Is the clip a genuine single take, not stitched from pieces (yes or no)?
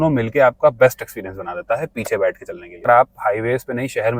no